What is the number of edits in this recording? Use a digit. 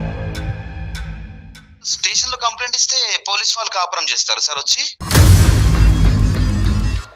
2